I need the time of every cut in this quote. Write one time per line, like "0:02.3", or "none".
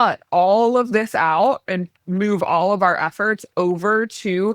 0:01.6